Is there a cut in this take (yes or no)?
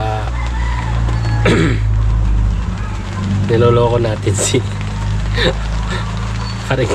no